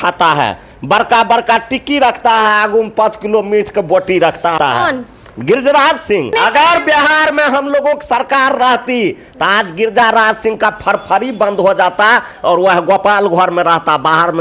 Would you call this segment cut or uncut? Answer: cut